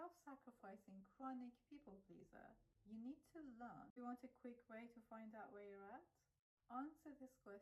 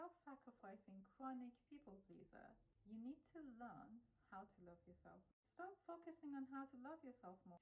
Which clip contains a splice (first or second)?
first